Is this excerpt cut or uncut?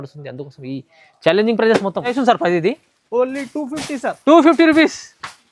cut